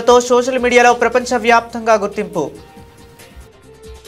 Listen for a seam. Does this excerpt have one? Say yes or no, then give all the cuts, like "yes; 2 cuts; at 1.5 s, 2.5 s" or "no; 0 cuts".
yes; 1 cut; at 2.6 s